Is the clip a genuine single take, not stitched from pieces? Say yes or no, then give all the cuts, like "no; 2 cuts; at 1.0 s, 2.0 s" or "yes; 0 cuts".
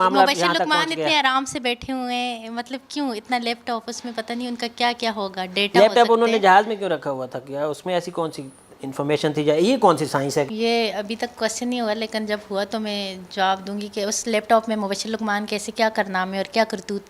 no; 1 cut; at 10.5 s